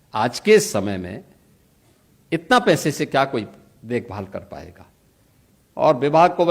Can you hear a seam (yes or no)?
no